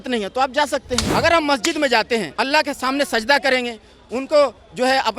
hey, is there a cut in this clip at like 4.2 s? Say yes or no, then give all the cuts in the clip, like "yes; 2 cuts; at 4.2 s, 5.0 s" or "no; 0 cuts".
no; 2 cuts; at 1.0 s, 2.3 s